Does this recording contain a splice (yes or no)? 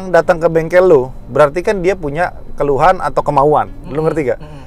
no